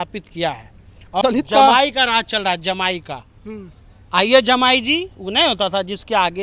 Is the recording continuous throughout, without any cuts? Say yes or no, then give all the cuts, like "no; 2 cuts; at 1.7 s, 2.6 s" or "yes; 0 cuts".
no; 1 cut; at 1.2 s